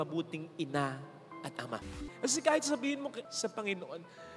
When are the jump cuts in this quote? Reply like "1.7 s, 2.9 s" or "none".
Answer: 2.0 s, 3.3 s